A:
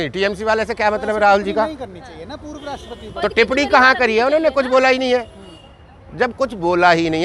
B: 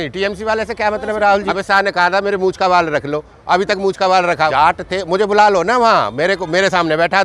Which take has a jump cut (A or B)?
B